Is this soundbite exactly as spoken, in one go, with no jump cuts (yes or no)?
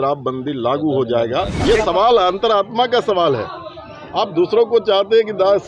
no